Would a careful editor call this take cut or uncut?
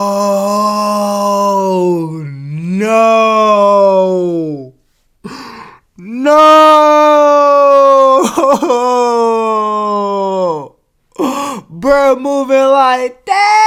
uncut